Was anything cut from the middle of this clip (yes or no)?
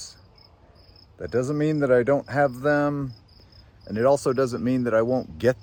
no